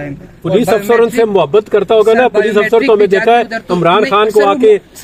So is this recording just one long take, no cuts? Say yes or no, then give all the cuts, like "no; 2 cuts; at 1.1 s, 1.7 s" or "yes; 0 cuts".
yes; 0 cuts